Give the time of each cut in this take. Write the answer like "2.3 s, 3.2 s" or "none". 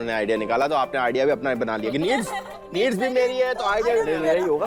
none